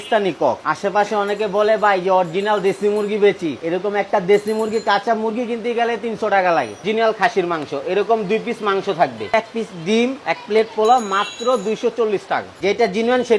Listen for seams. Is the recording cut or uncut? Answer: cut